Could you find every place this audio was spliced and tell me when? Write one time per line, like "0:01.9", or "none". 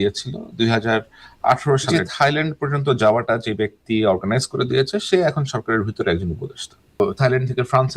0:01.9
0:07.0

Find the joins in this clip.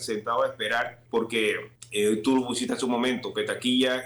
0:01.0
0:01.7

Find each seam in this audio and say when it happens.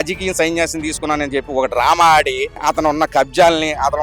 0:02.6

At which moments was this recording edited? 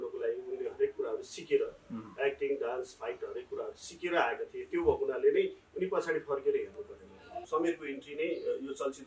0:07.4

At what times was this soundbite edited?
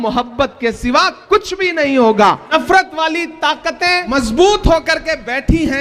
0:02.5
0:04.1

